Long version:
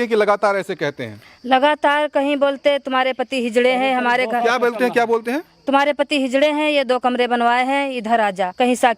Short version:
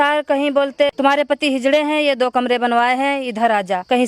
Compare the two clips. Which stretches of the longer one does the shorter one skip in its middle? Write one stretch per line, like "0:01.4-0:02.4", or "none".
0:02.8-0:05.6